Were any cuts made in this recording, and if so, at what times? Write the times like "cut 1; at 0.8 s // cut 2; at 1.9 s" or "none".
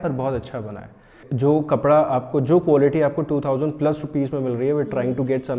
cut 1; at 1.2 s